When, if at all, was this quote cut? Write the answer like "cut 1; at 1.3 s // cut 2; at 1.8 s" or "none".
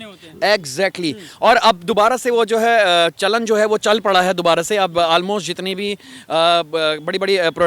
none